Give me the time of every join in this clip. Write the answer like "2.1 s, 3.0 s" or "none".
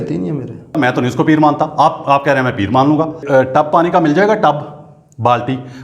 0.8 s, 3.2 s